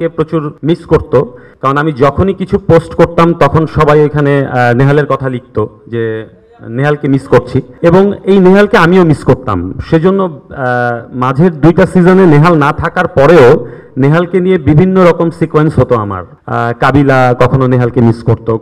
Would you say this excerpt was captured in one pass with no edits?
yes; 0 cuts

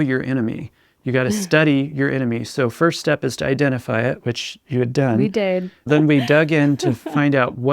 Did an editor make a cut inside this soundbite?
yes; 1 cut; at 5.8 s

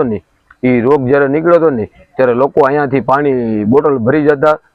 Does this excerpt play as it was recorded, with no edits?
yes; 0 cuts

